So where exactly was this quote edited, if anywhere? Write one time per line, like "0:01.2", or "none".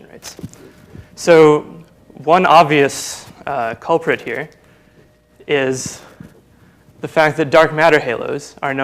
0:07.1

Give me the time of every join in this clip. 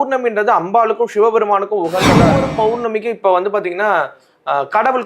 0:02.3

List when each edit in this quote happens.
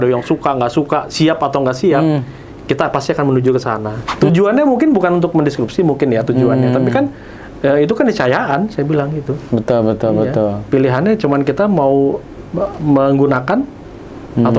0:04.0

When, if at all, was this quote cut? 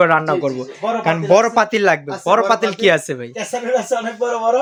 none

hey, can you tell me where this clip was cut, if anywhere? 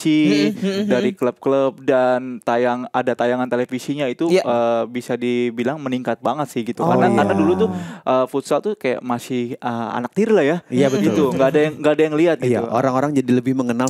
none

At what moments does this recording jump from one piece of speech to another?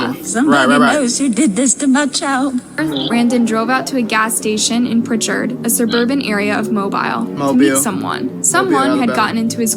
0:02.8

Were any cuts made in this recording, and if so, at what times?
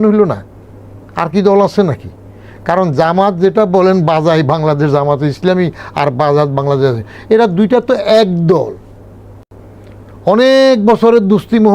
none

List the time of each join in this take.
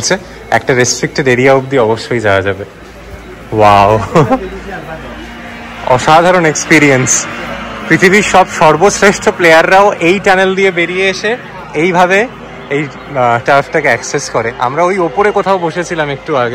none

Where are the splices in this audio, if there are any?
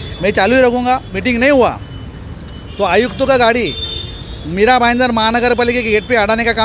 0:01.1

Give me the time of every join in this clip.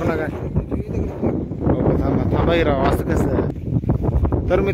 0:03.5

